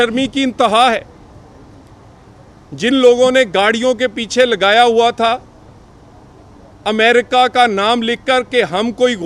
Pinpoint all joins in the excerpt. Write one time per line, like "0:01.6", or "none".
none